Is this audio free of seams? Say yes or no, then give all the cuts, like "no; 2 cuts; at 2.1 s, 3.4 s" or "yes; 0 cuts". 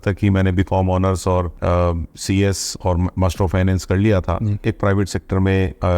no; 2 cuts; at 1.5 s, 4.6 s